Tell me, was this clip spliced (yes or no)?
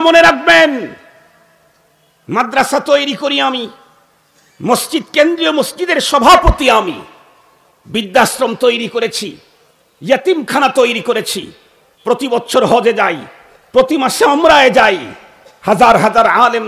no